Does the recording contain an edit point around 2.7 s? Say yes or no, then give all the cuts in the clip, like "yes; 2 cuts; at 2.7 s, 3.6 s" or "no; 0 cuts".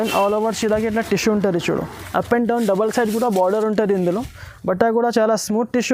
no; 0 cuts